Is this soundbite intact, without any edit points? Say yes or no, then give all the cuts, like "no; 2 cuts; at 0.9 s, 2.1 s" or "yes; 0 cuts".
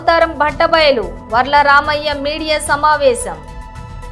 yes; 0 cuts